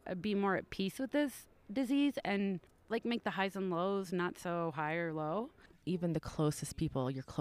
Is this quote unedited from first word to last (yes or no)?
no